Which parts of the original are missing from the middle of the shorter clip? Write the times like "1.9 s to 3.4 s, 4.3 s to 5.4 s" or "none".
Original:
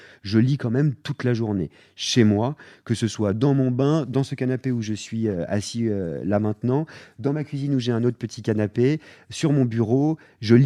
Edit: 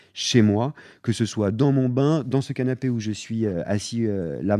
none

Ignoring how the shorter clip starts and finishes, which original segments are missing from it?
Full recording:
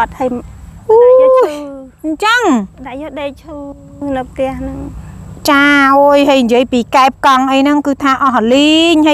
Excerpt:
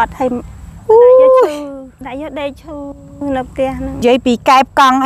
1.9 s to 2.7 s, 4.8 s to 6.5 s

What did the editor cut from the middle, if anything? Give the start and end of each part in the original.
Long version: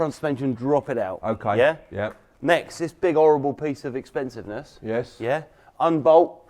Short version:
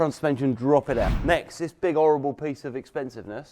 1.1 s to 2.3 s

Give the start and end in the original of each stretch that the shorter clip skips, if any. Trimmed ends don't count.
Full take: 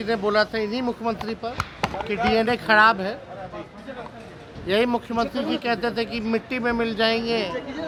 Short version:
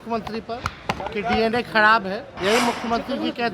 3.2 s to 4.6 s

